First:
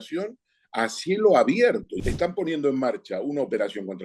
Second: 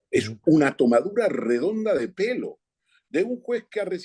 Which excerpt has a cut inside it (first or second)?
first